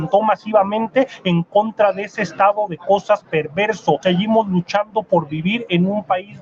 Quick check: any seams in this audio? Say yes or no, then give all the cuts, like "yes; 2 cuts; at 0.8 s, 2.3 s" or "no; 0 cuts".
yes; 1 cut; at 4.0 s